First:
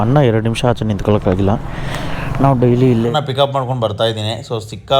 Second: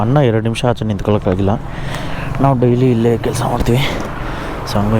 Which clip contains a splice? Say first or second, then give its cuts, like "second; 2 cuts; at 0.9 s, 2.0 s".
first; 1 cut; at 3.1 s